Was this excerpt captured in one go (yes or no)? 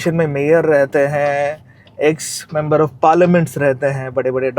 yes